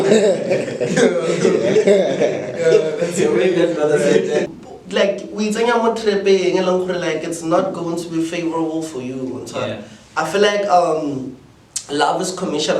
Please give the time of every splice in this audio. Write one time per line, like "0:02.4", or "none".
0:04.6